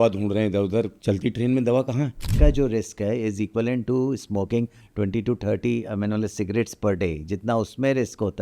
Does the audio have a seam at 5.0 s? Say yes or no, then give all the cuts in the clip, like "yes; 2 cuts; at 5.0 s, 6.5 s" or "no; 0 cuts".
no; 2 cuts; at 0.9 s, 2.2 s